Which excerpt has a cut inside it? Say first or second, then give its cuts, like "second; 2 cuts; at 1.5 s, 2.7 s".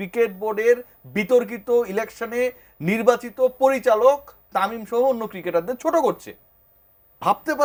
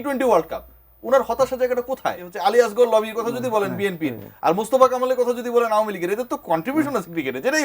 second; 1 cut; at 2.3 s